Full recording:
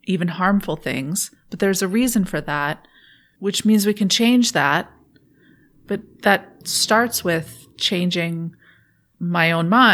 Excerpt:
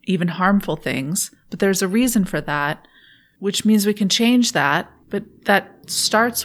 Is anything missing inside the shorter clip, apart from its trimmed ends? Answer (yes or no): yes